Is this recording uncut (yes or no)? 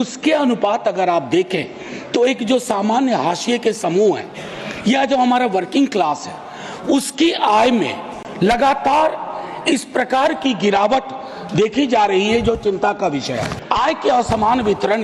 no